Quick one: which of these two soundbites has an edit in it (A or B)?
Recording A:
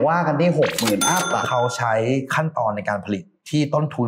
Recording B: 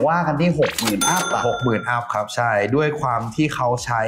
A